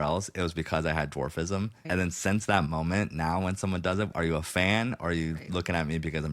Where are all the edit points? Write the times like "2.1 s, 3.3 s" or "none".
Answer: 1.8 s, 4.1 s